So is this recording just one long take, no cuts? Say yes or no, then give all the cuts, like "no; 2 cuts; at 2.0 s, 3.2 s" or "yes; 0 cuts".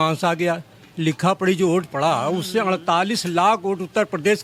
yes; 0 cuts